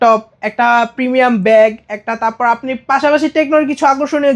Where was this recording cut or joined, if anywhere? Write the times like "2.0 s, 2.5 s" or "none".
none